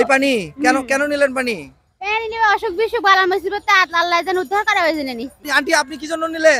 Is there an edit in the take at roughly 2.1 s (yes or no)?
no